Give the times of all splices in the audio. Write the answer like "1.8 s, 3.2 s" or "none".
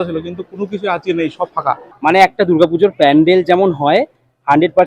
1.9 s